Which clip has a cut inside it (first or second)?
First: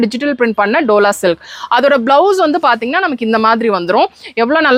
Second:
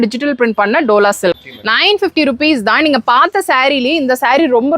second